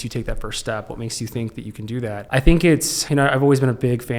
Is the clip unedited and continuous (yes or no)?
no